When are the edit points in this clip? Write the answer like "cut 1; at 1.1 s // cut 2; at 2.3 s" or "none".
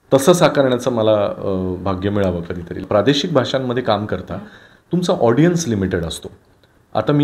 cut 1; at 2.8 s